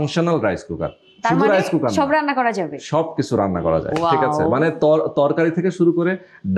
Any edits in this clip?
no; 0 cuts

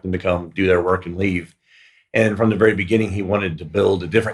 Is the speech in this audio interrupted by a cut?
no; 0 cuts

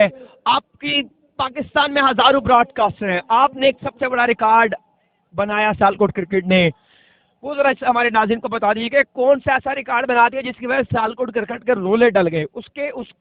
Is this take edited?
no; 0 cuts

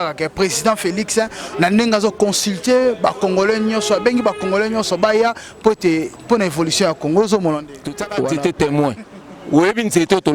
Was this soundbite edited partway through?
yes; 1 cut; at 8.3 s

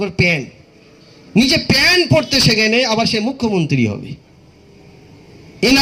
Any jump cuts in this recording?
no; 0 cuts

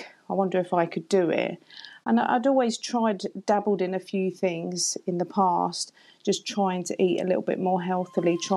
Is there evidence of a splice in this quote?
no; 0 cuts

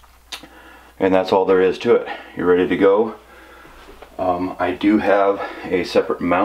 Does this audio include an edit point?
yes; 1 cut; at 2.4 s

